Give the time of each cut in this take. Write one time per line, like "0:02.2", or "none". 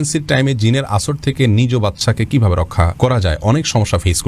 none

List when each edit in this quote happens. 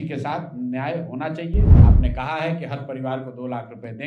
0:01.8

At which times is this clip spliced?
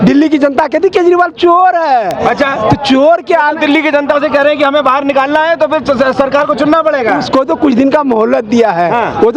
none

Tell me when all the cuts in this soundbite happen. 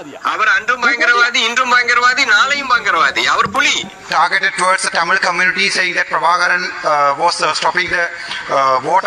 0:04.0

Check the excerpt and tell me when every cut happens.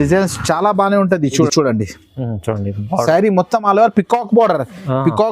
0:01.5

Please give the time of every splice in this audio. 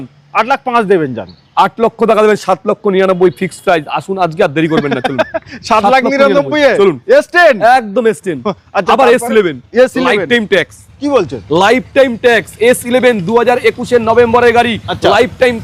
none

